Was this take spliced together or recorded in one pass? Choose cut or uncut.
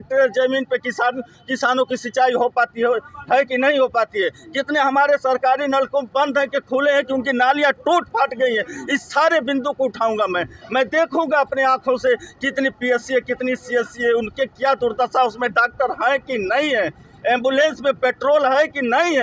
uncut